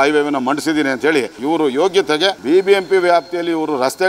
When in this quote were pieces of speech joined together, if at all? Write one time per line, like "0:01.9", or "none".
0:01.3
0:02.4